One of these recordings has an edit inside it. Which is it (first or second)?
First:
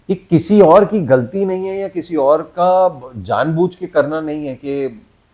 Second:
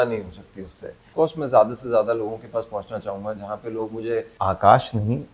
second